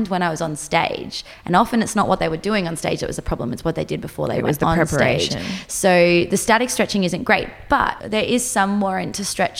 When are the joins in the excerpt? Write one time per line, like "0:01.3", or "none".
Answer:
0:08.0